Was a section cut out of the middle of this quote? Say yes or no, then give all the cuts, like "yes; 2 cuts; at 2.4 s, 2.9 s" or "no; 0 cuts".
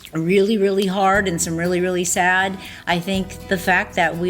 yes; 1 cut; at 3.3 s